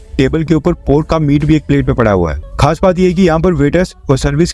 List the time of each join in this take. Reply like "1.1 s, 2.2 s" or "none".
2.4 s